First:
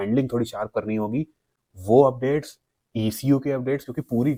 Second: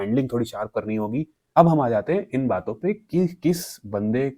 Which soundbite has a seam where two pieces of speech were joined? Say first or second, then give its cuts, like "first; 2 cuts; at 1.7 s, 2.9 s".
second; 1 cut; at 1.4 s